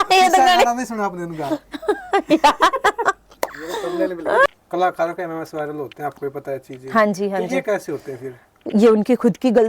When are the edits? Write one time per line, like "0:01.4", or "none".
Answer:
0:04.5